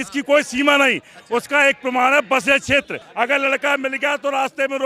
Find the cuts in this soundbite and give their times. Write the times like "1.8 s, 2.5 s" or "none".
3.0 s